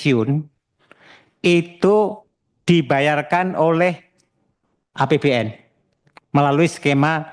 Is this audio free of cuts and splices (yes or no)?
yes